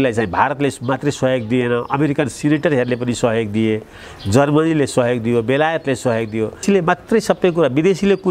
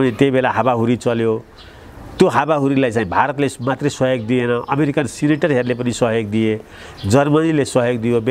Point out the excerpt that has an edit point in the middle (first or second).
first